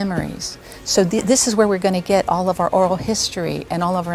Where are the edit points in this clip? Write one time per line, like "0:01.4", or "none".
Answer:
none